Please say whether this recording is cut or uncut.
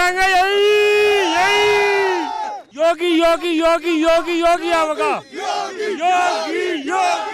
cut